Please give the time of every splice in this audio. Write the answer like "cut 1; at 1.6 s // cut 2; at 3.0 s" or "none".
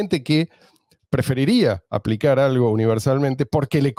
none